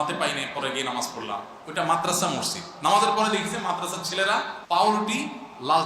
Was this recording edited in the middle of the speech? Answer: yes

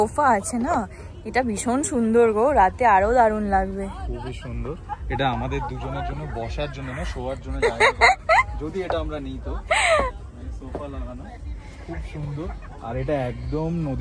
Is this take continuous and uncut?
yes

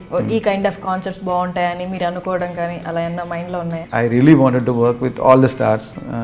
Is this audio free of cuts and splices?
no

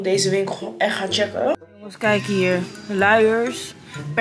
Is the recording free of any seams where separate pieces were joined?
no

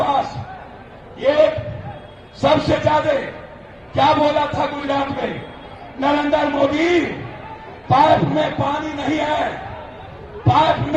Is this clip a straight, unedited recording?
yes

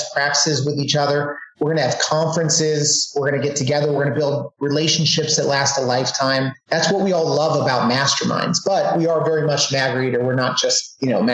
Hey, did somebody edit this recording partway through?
no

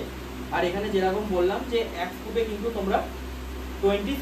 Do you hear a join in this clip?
no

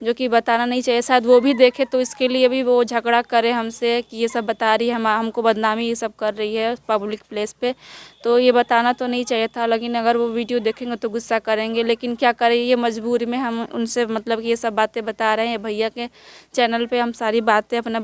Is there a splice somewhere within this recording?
no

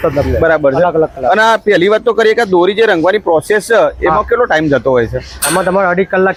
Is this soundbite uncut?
yes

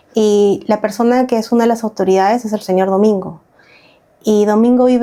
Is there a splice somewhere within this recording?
no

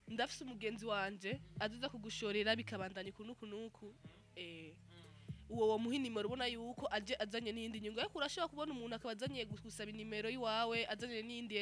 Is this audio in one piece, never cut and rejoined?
yes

